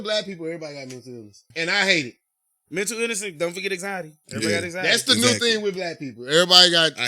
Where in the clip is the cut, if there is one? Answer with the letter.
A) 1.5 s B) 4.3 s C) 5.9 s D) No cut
A